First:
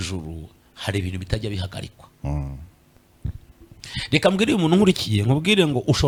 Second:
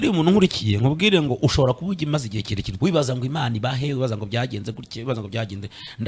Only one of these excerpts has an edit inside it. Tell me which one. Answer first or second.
second